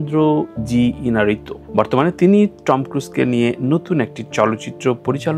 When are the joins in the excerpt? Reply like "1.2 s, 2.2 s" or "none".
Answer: none

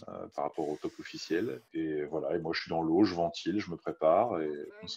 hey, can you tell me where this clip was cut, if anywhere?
1.6 s

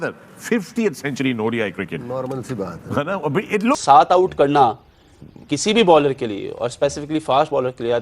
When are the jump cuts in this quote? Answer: 3.8 s

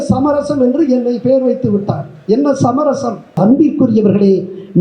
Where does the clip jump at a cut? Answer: 3.4 s

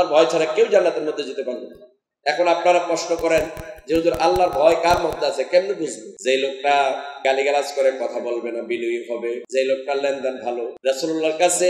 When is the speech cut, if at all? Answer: 6.1 s, 7.1 s, 9.4 s, 10.7 s

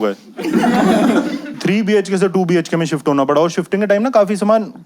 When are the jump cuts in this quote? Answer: 1.6 s

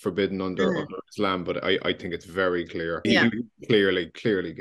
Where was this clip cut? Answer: 3.0 s

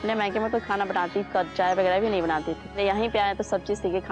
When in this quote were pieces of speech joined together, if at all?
2.6 s

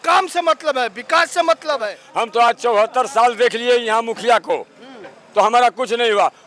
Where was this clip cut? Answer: 2.0 s

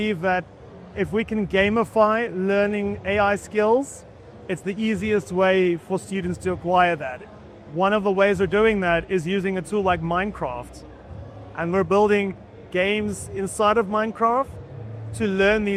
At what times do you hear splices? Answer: none

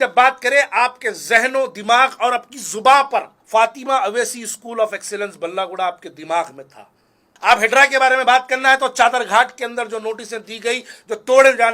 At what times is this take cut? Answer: 3.3 s, 7.0 s

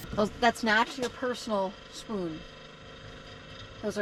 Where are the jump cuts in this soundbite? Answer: none

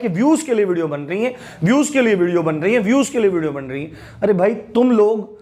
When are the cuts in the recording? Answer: none

